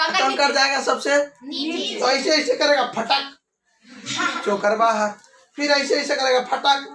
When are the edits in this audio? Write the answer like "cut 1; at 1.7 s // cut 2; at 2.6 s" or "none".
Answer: none